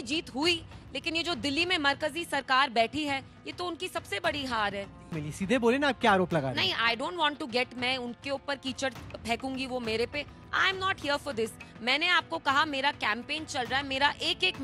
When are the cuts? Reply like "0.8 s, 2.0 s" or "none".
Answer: 5.1 s